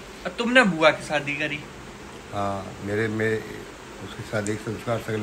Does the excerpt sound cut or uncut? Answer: uncut